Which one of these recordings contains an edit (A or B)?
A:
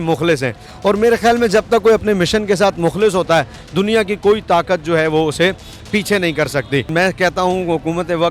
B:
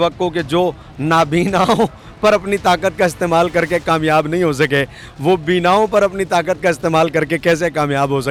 A